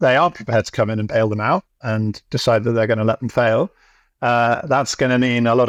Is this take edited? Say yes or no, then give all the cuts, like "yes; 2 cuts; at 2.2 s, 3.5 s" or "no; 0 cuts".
no; 0 cuts